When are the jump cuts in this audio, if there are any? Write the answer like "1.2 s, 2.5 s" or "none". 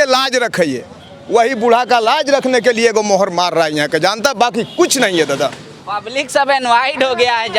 none